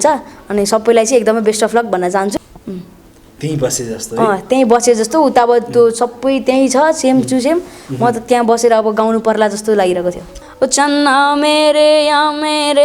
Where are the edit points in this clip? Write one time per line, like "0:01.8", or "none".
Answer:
0:02.3
0:10.4